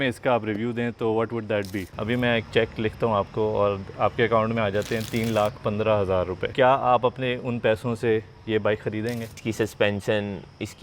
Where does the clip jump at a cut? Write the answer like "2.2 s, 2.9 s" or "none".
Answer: 1.8 s, 6.4 s, 9.3 s